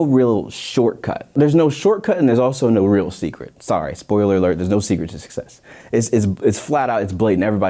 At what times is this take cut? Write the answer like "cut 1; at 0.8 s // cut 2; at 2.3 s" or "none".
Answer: cut 1; at 1.3 s

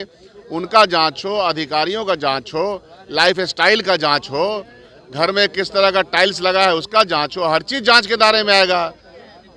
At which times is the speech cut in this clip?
none

